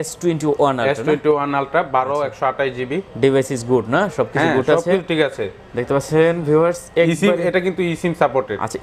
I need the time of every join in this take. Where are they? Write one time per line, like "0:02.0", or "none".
none